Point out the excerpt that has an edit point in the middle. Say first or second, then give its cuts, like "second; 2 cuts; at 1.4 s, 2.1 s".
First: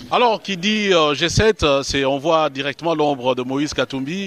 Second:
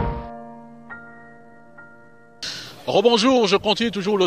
second; 1 cut; at 2.2 s